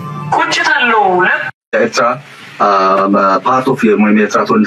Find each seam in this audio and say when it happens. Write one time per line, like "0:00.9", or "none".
0:01.7